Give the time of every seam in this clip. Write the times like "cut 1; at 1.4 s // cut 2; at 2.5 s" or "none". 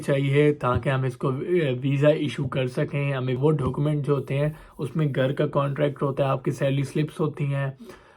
cut 1; at 3.4 s

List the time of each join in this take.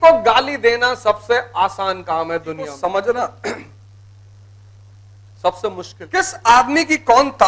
cut 1; at 2.7 s // cut 2; at 6.0 s

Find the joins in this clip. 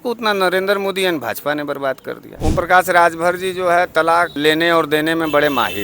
cut 1; at 2.3 s // cut 2; at 4.3 s

